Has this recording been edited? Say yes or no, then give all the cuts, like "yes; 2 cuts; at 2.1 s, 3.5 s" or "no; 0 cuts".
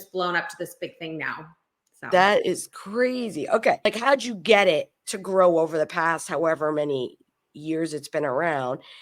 yes; 1 cut; at 3.8 s